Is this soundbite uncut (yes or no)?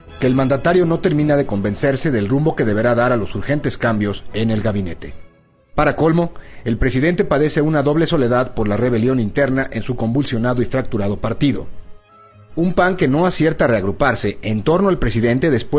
yes